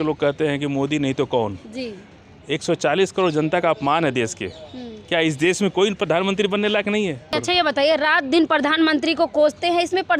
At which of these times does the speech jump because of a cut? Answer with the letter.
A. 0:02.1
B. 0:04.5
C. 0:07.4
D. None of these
C